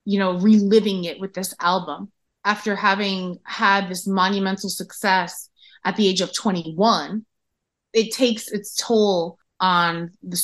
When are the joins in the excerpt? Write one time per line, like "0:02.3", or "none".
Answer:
0:09.4

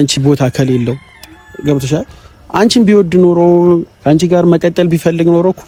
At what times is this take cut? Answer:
none

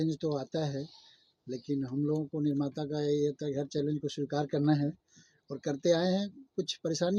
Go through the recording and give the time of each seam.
none

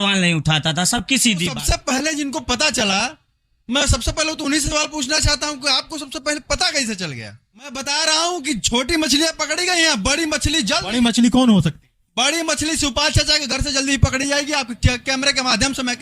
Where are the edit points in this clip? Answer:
0:01.6
0:07.9

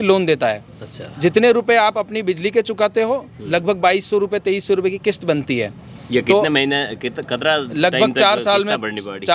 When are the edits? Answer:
none

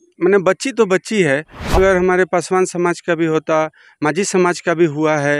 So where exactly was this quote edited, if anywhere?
0:01.8

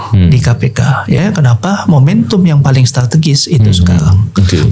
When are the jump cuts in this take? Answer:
0:01.2

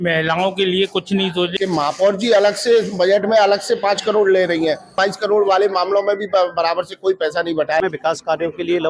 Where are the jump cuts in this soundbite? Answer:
0:01.5
0:05.0
0:07.8

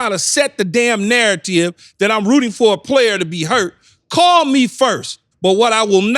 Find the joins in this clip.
0:05.2

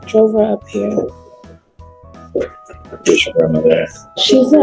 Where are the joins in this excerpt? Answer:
none

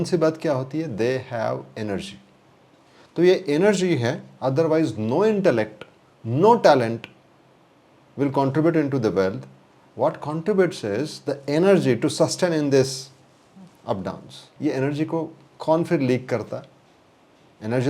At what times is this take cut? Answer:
0:14.5

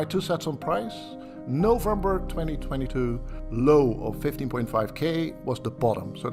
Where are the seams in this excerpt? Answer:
0:03.3

